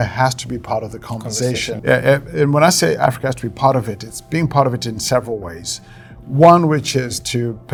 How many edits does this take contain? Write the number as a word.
zero